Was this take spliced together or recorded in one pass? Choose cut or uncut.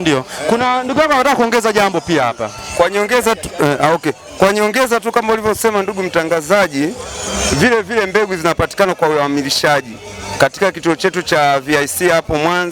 uncut